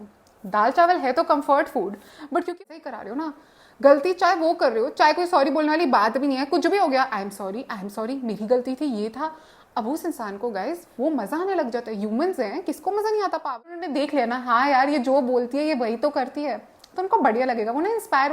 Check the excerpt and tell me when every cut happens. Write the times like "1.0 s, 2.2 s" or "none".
2.6 s, 13.6 s